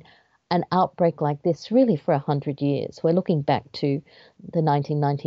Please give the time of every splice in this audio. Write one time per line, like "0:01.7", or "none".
none